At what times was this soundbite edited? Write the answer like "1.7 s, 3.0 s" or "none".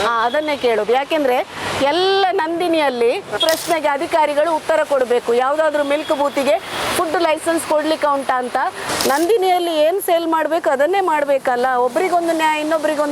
3.4 s, 8.9 s